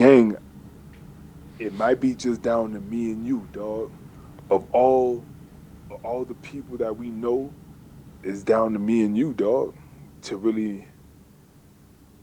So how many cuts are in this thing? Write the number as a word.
one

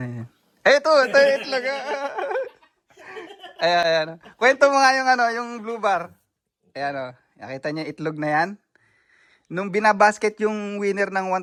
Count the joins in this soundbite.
zero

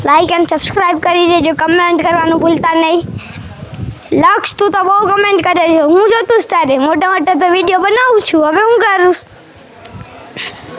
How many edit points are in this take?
zero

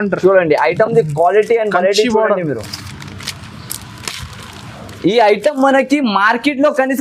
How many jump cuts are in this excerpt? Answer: zero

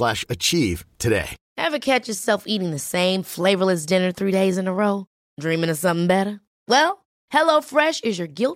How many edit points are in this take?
one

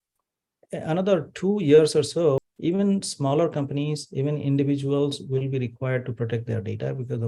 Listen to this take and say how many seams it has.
one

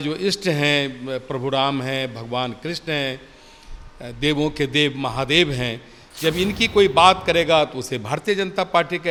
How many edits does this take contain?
zero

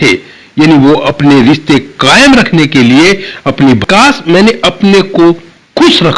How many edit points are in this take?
one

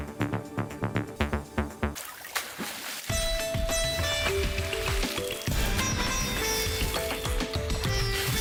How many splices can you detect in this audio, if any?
zero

